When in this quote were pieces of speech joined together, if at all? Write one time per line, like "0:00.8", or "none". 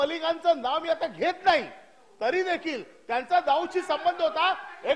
none